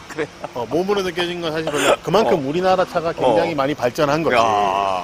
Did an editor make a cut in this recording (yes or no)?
no